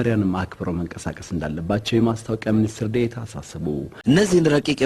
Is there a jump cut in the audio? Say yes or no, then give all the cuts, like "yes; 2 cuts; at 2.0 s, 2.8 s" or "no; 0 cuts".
yes; 1 cut; at 3.9 s